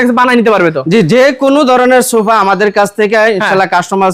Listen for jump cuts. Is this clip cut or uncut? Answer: uncut